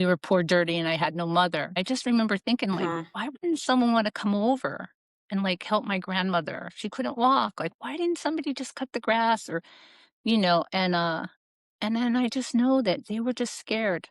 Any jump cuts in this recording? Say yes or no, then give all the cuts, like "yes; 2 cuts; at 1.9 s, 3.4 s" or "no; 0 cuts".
yes; 1 cut; at 1.8 s